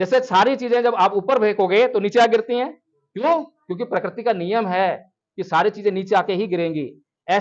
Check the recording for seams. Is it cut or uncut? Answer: uncut